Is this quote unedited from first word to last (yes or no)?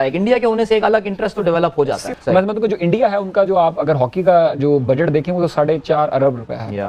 yes